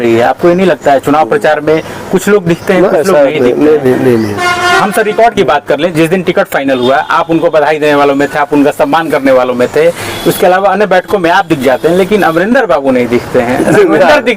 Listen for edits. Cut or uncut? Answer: uncut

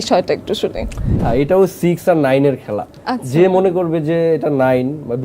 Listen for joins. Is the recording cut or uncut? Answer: cut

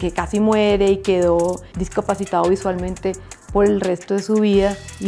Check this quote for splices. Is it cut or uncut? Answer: cut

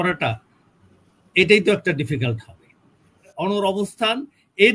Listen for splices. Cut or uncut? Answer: cut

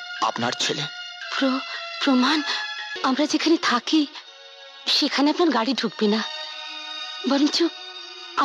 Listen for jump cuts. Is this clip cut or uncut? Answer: cut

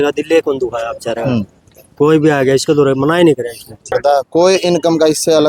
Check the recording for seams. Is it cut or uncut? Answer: cut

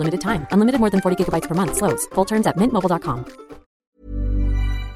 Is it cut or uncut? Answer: cut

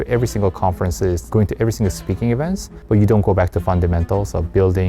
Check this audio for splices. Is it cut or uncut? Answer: cut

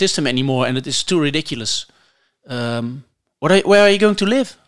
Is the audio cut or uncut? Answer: uncut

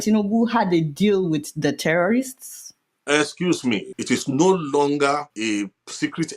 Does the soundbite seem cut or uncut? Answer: cut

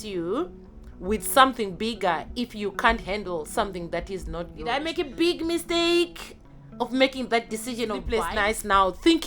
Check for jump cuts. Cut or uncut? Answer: cut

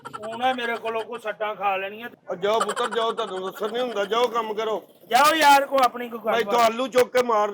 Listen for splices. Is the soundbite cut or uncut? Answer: cut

